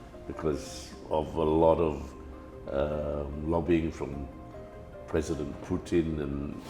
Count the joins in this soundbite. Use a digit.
0